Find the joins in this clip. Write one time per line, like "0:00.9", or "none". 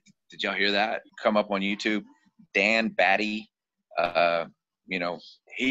0:01.1